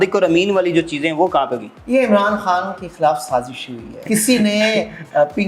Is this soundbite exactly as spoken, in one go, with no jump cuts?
no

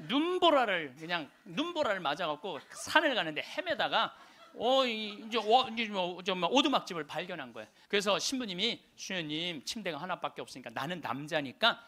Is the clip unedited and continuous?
no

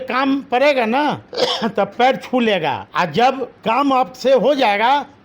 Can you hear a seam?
yes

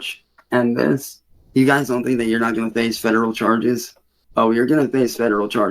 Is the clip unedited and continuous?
yes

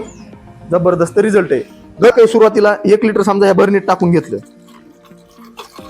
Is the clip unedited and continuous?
no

